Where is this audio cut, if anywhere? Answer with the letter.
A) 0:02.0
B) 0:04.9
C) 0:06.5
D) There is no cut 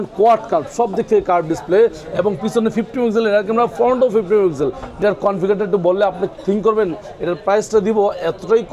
B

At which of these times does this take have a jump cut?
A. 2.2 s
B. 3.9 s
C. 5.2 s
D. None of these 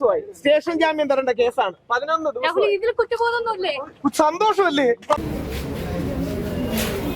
C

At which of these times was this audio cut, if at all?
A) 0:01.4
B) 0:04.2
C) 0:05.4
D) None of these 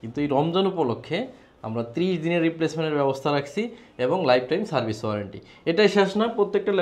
D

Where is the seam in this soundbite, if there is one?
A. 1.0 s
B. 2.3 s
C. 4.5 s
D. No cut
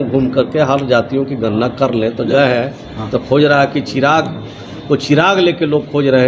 B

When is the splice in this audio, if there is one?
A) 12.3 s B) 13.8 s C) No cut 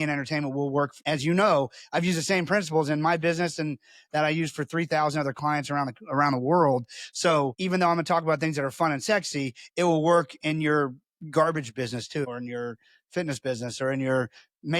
A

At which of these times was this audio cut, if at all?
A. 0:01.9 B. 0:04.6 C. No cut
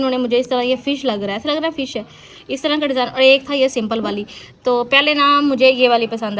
C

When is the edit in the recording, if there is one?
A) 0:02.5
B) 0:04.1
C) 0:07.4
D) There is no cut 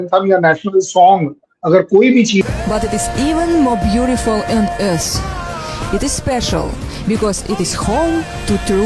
A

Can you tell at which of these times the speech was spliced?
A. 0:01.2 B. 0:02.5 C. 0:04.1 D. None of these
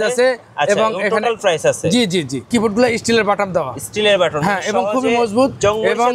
B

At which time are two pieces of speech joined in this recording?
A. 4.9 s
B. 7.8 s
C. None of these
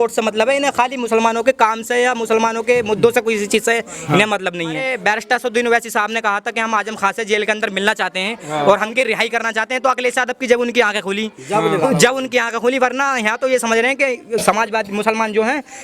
A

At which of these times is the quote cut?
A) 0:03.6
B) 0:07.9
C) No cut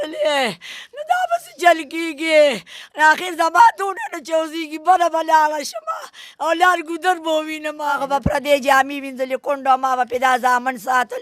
B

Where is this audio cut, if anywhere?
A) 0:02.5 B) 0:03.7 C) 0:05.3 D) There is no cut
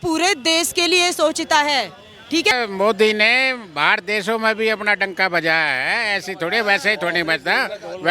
A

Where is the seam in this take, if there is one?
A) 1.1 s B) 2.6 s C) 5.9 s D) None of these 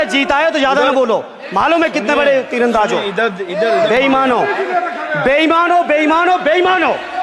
D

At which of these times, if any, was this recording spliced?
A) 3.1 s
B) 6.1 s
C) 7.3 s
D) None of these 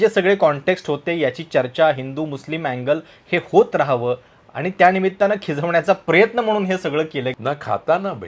C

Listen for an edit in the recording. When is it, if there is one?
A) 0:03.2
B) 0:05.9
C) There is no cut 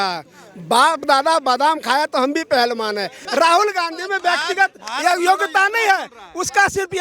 A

